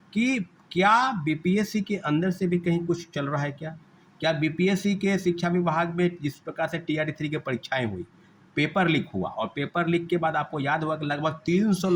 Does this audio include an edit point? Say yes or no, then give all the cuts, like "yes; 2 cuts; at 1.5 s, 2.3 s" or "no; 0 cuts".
no; 0 cuts